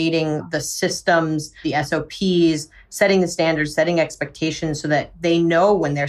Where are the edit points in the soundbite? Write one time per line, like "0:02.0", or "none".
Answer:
0:01.5